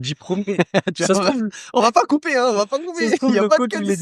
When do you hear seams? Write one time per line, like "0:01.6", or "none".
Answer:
none